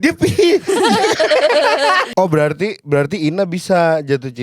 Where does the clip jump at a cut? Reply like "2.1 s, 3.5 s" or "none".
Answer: 2.1 s